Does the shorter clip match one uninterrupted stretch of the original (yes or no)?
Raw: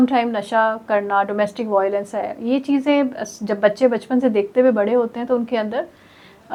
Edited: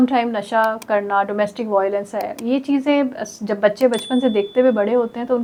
yes